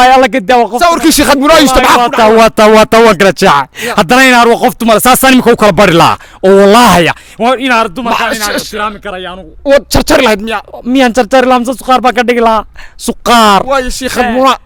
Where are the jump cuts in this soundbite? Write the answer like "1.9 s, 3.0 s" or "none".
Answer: none